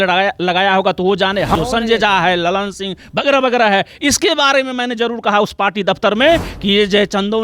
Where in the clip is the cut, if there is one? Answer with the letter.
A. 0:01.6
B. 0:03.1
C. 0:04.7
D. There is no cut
A